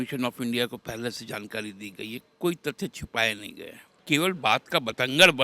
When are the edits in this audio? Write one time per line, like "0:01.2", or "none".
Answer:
0:04.0